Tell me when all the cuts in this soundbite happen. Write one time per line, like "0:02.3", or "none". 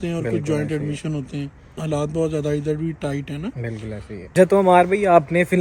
0:01.7
0:04.2